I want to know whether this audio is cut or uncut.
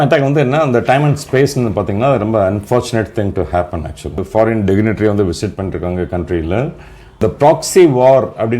cut